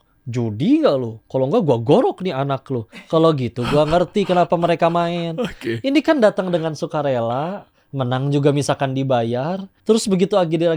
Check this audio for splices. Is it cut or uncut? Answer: cut